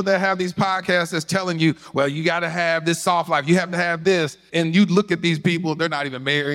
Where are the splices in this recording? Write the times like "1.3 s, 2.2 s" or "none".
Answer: 4.4 s